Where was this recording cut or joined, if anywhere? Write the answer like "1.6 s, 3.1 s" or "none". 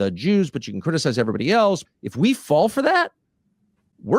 1.9 s